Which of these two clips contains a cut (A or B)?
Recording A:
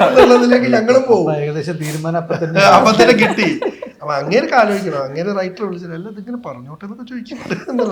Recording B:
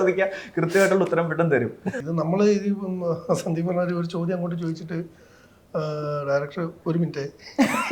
B